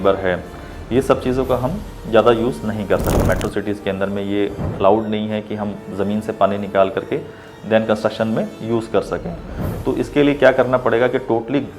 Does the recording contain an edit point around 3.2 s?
yes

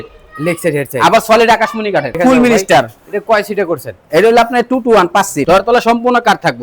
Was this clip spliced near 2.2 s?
yes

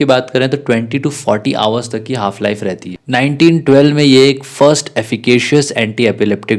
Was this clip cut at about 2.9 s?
yes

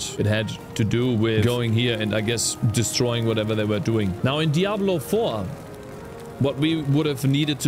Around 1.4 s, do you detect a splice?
yes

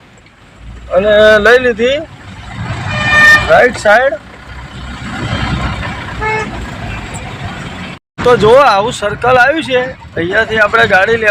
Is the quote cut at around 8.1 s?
yes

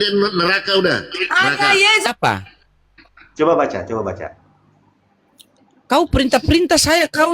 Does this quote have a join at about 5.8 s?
no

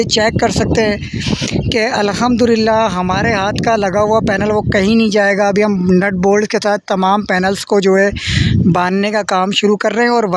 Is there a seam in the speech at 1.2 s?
no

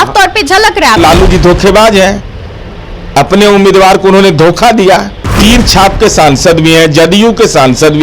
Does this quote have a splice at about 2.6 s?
no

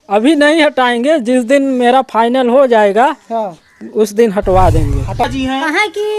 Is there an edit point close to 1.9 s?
no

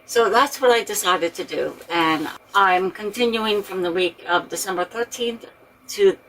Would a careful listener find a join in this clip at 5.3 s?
no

